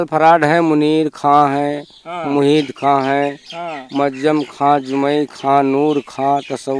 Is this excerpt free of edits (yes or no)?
yes